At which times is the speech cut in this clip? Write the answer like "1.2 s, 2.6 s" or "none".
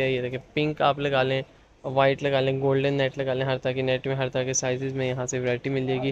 none